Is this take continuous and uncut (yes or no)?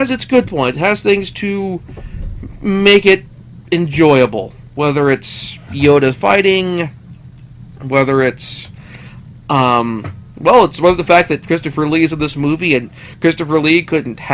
yes